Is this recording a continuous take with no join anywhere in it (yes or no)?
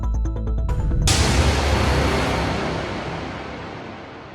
no